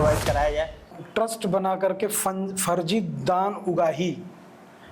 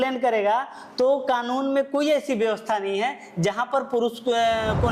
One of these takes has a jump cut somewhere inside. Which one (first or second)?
first